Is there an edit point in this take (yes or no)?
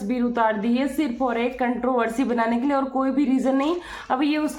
no